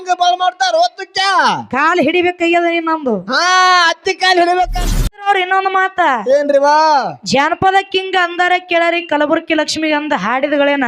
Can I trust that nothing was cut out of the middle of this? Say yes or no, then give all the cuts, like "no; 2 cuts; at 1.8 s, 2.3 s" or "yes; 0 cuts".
no; 1 cut; at 5.3 s